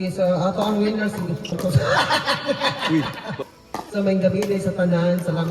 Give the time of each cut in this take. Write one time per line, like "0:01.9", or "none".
0:01.5
0:03.5